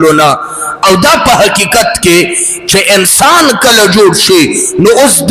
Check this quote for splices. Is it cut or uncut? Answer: uncut